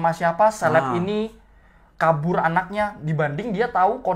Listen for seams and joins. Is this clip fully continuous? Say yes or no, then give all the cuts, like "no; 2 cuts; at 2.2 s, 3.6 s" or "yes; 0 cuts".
yes; 0 cuts